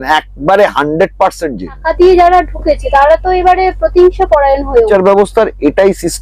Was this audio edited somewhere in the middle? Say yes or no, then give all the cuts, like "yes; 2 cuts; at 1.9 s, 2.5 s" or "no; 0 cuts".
yes; 2 cuts; at 1.8 s, 4.9 s